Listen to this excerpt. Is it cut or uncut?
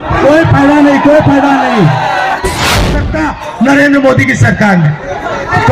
cut